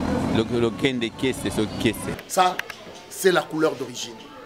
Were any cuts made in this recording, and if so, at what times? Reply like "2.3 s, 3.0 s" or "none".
2.2 s